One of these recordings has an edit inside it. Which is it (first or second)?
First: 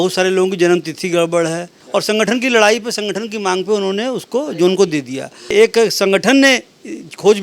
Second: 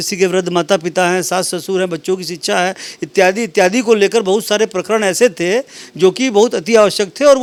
first